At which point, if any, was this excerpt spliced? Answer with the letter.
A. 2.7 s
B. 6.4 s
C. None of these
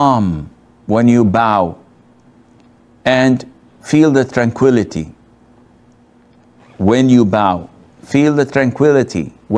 C